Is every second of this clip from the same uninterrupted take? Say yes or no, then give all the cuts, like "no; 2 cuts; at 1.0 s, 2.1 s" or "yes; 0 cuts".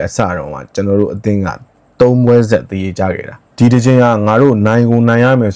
no; 1 cut; at 3.4 s